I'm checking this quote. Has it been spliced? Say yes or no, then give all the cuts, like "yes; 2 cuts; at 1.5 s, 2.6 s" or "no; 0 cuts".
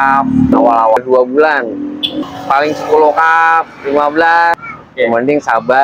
yes; 3 cuts; at 1.0 s, 2.2 s, 4.6 s